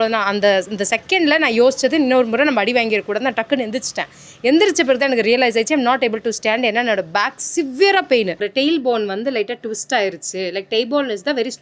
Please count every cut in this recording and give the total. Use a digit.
1